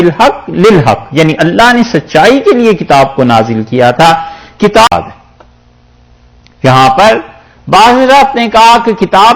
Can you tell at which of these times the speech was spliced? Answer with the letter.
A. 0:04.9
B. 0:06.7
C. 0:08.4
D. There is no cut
A